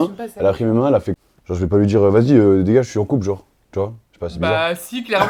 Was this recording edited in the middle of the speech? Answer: yes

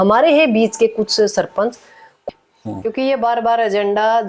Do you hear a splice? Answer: yes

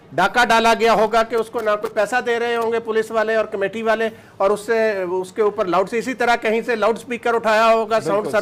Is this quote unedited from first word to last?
yes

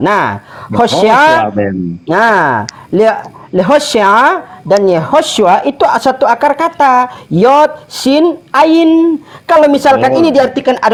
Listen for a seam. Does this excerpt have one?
no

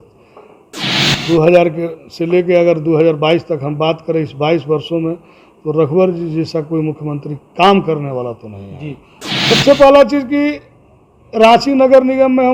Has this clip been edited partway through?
yes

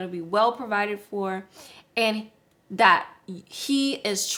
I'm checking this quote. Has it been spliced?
no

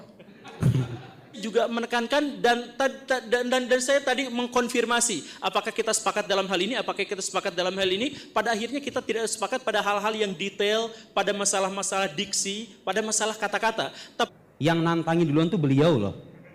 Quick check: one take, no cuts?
no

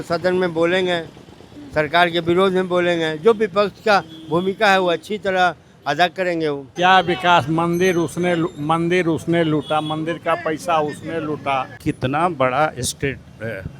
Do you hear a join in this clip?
yes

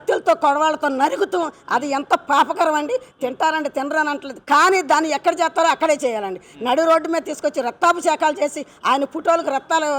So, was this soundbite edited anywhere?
no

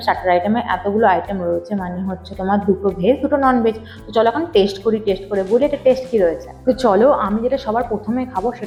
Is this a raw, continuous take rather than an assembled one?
yes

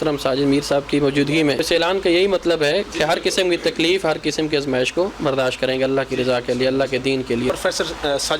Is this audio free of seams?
no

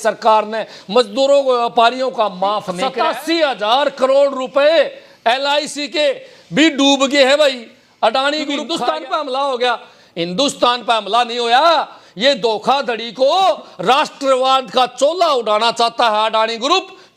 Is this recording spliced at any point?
yes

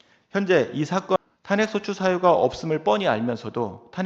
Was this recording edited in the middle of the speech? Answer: yes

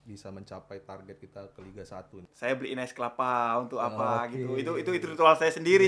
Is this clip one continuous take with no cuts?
no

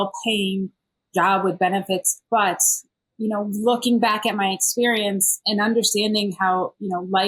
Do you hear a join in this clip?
yes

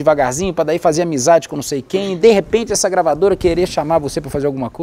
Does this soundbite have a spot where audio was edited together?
yes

